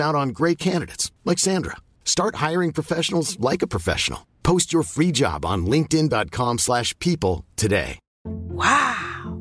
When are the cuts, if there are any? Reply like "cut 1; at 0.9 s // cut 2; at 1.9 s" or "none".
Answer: none